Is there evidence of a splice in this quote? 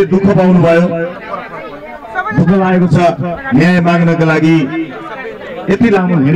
no; 0 cuts

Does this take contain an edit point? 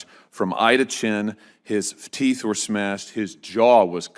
no; 0 cuts

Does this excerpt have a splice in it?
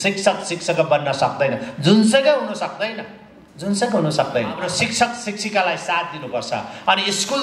yes; 1 cut; at 4.6 s

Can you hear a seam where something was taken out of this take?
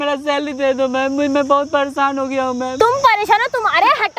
yes; 1 cut; at 2.8 s

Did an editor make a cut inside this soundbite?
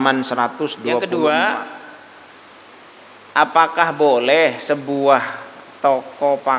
yes; 1 cut; at 1.0 s

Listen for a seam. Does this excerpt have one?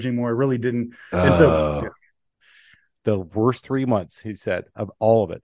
yes; 1 cut; at 2.5 s

